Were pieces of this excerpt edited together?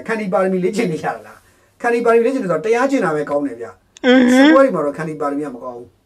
no; 0 cuts

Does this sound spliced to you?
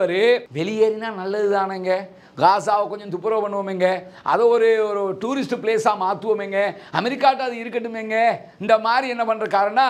no; 0 cuts

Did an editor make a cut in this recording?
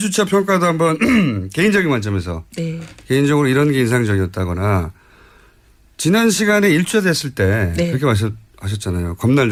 no; 0 cuts

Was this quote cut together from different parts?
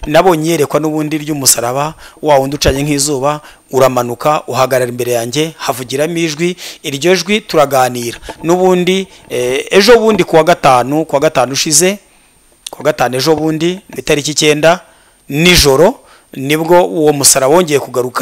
yes; 1 cut; at 13.9 s

